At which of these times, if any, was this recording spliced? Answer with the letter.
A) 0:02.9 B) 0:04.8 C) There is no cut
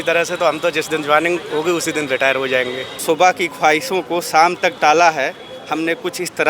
A